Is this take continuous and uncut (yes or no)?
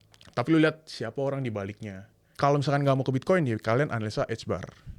no